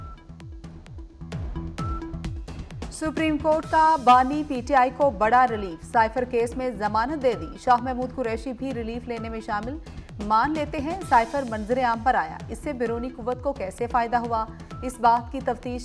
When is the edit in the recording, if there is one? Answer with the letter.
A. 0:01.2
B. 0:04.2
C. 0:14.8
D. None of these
A